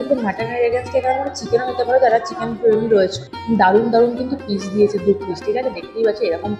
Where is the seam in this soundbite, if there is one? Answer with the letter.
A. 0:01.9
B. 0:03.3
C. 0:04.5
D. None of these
B